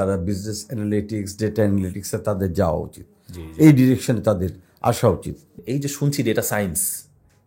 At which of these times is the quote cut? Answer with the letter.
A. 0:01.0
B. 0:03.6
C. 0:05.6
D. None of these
C